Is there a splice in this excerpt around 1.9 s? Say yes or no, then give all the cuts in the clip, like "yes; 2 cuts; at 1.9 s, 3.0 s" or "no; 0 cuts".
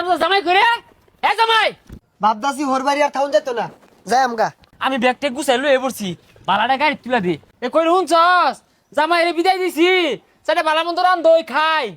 yes; 3 cuts; at 1.9 s, 4.6 s, 7.5 s